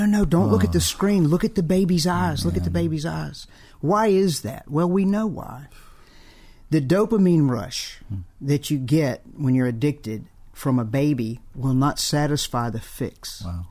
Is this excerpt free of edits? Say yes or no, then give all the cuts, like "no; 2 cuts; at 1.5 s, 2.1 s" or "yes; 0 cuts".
yes; 0 cuts